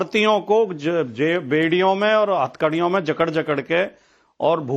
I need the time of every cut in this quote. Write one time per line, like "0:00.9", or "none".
none